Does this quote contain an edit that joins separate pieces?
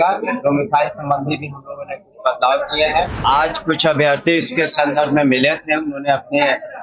yes; 1 cut; at 3.1 s

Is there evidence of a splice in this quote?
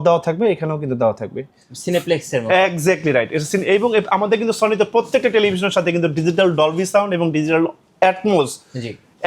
yes; 1 cut; at 1.6 s

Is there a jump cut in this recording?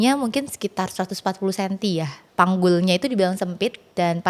yes; 1 cut; at 2.2 s

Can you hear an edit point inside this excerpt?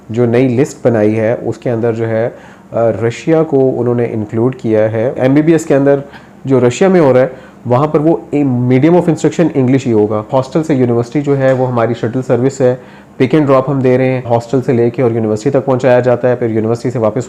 yes; 3 cuts; at 5.2 s, 10.3 s, 14.3 s

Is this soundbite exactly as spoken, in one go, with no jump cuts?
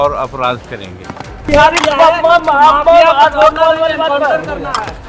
no; 1 cut; at 1.5 s

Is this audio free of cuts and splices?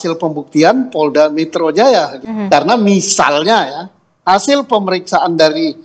no; 1 cut; at 2.2 s

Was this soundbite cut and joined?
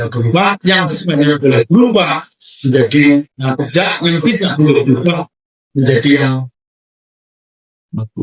no; 0 cuts

